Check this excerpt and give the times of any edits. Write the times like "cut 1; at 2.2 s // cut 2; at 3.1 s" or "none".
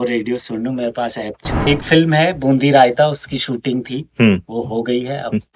cut 1; at 1.6 s